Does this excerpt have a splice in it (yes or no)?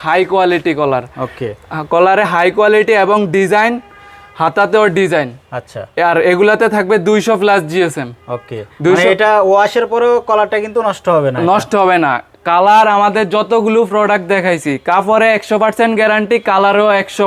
no